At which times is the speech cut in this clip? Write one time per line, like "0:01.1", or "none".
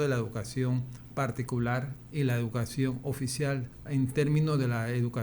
0:01.0
0:02.0
0:03.7